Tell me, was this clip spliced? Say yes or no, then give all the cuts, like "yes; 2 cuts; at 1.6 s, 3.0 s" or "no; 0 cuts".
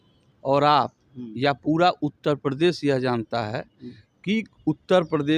no; 0 cuts